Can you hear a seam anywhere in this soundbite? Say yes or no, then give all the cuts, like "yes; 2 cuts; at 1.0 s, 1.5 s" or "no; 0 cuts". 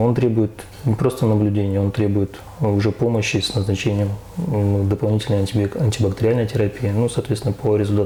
no; 0 cuts